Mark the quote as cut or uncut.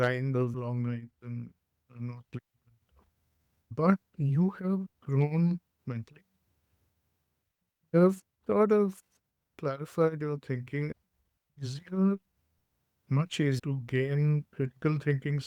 cut